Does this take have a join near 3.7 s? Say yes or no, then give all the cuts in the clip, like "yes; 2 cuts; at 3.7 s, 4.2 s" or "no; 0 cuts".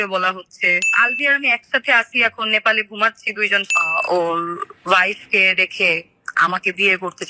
yes; 2 cuts; at 1.0 s, 3.7 s